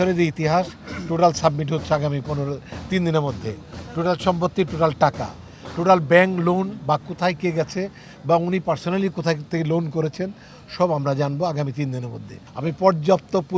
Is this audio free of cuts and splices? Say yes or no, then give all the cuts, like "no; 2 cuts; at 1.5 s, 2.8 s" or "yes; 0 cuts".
yes; 0 cuts